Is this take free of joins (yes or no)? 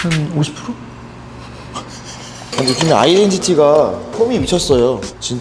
no